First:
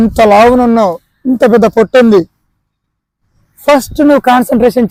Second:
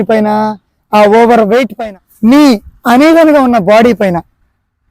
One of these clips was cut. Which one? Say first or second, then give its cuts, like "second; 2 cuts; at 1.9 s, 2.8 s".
second; 1 cut; at 1.8 s